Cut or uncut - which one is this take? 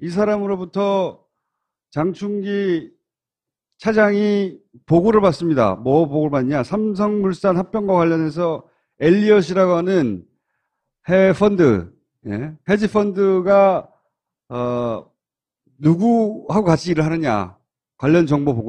cut